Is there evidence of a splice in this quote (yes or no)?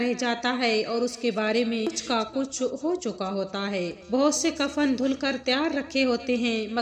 yes